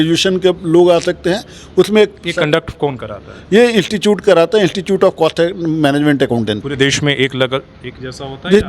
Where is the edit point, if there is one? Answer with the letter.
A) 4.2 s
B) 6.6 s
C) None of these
B